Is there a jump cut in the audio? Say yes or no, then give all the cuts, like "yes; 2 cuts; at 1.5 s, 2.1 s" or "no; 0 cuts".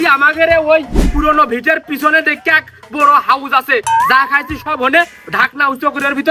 no; 0 cuts